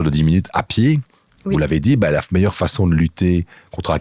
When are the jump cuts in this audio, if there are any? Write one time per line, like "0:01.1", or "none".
none